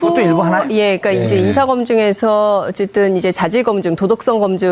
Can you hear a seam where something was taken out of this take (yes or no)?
yes